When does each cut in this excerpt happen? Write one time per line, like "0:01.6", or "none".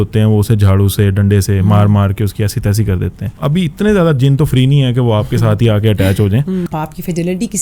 0:03.3
0:06.7

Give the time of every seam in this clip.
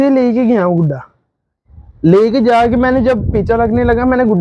none

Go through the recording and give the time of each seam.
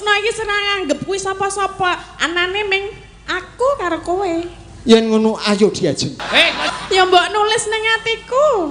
0:06.6

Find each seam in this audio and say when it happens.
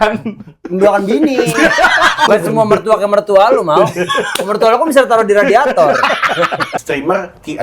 0:02.3
0:06.8

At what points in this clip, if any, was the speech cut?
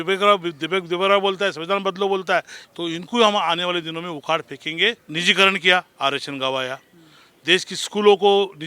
0:02.6
0:05.0

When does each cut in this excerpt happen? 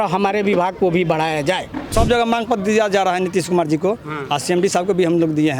0:01.9

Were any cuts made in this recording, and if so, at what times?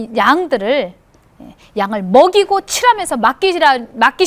none

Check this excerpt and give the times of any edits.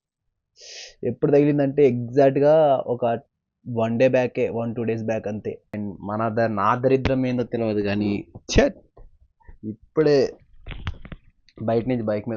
0:05.7

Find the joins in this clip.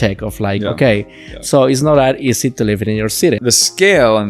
0:03.4

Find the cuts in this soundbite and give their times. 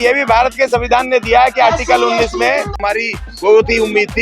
0:02.8

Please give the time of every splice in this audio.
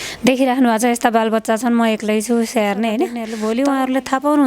0:03.3

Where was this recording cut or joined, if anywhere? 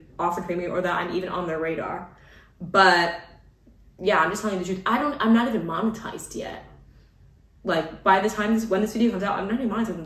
none

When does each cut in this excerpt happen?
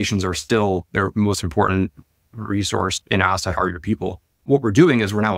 0:04.3

